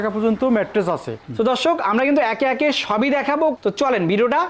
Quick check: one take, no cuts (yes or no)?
yes